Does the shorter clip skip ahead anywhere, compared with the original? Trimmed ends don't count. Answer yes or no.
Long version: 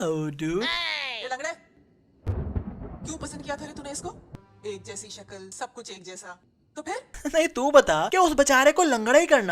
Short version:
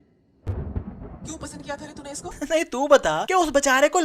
yes